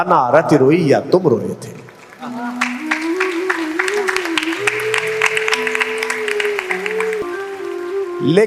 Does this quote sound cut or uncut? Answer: cut